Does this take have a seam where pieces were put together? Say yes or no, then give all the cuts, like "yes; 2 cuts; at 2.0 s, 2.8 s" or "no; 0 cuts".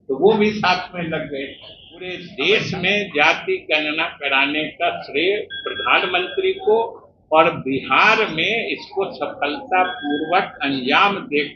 yes; 1 cut; at 2.2 s